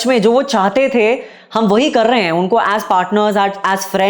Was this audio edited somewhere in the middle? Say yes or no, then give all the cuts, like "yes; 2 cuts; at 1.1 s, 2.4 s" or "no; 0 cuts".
no; 0 cuts